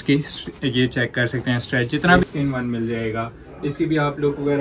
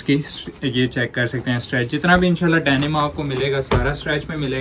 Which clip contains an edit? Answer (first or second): first